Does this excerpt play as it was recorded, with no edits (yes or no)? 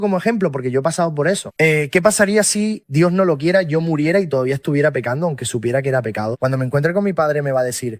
yes